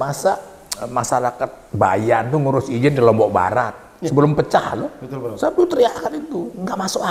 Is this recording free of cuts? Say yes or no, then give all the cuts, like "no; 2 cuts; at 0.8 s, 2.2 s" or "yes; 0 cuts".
yes; 0 cuts